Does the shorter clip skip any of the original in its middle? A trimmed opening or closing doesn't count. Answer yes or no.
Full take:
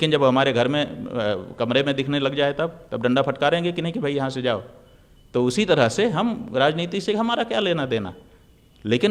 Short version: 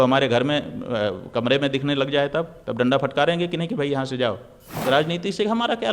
yes